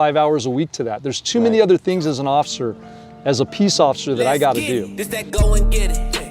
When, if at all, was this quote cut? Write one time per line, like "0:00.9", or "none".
0:05.0